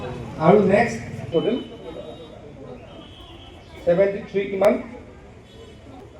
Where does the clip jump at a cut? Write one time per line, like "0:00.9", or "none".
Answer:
0:01.9

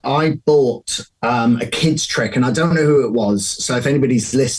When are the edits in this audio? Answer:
none

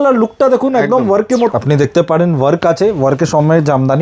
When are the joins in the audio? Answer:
0:01.5

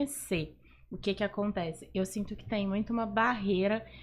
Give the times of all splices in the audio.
none

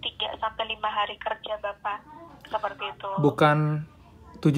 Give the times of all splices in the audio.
none

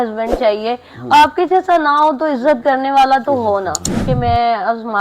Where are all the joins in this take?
0:03.9

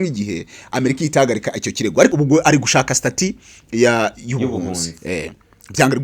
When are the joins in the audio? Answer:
0:02.1

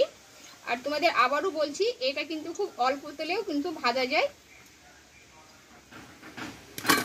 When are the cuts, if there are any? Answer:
0:06.1

